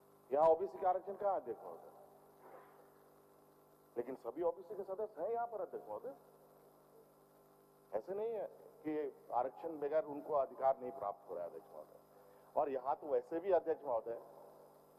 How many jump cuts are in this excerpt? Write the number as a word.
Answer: zero